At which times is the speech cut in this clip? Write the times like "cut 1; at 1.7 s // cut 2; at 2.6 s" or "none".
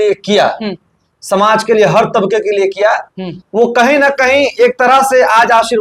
none